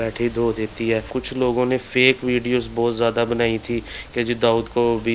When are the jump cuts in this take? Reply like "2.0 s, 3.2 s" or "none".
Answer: 1.1 s